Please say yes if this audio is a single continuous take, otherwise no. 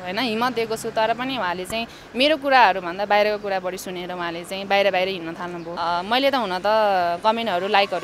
no